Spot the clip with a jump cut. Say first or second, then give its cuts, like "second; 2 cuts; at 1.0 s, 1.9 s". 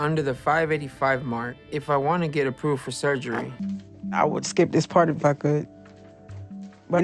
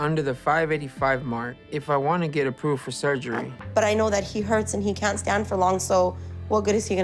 first; 1 cut; at 3.6 s